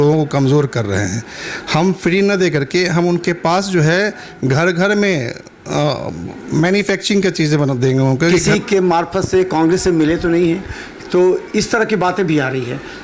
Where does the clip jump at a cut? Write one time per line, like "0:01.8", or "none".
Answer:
0:08.4